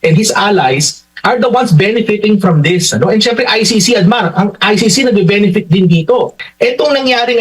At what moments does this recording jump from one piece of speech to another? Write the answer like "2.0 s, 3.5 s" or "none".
6.4 s